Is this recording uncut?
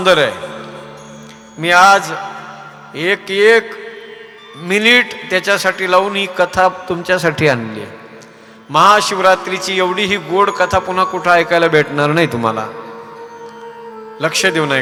yes; 0 cuts

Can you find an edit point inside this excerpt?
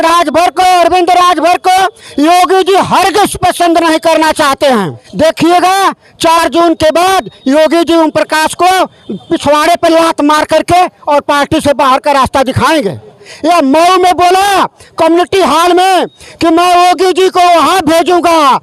yes; 2 cuts; at 5.0 s, 13.3 s

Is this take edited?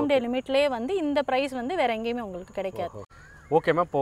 no; 0 cuts

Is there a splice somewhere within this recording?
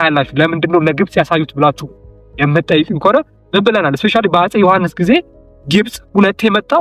no; 0 cuts

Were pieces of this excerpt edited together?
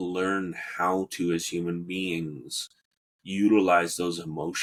no; 0 cuts

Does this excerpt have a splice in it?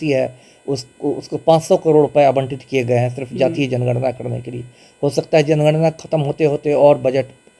no; 0 cuts

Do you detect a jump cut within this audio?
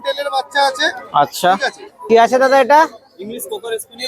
yes; 1 cut; at 1.9 s

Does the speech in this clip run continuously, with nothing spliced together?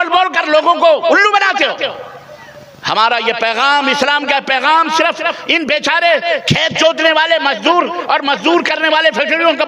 yes; 0 cuts

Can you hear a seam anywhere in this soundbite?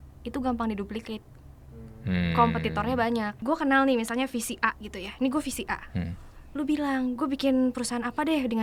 yes; 1 cut; at 3.4 s

